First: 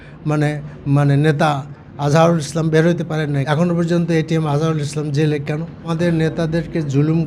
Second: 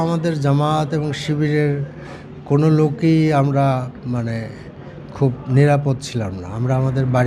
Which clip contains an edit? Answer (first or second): first